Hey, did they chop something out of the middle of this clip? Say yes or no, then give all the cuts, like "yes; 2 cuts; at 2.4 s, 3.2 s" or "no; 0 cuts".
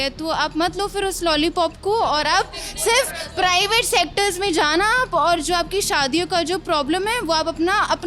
no; 0 cuts